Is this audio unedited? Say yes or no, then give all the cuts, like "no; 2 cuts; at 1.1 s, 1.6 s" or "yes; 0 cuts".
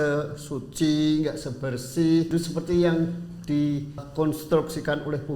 no; 2 cuts; at 2.3 s, 4.0 s